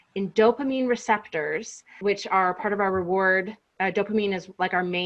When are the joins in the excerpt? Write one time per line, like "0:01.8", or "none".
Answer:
0:01.9